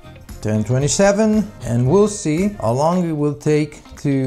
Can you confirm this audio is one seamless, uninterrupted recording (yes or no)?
no